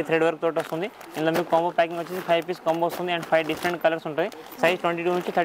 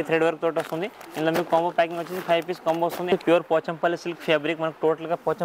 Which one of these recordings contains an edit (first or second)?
second